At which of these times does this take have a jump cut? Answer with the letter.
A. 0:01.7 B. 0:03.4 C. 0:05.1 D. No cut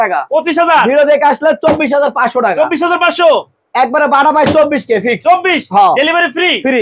D